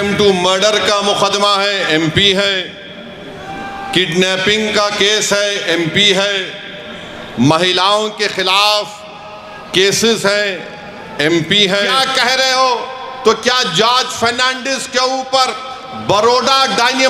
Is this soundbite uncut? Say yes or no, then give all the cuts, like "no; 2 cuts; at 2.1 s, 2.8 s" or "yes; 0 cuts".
no; 1 cut; at 12.0 s